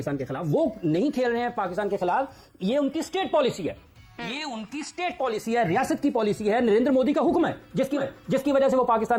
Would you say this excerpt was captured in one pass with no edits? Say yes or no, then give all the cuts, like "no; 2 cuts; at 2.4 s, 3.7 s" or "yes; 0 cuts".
yes; 0 cuts